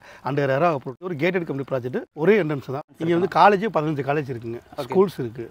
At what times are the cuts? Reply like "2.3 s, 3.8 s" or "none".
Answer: 1.1 s, 2.1 s, 2.9 s